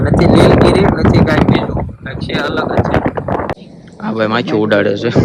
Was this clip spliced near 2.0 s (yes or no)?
no